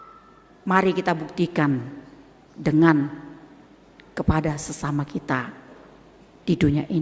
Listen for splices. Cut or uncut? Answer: uncut